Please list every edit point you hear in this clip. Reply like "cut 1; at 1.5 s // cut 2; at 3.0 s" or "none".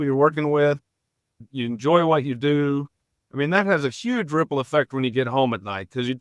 none